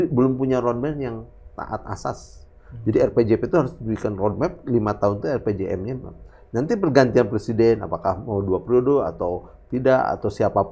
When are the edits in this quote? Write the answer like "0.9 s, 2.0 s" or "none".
none